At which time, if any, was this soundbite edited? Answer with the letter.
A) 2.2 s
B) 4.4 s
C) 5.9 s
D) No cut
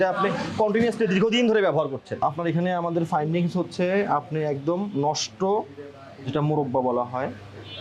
A